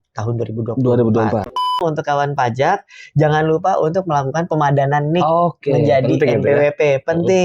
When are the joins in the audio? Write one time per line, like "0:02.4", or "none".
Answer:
0:01.8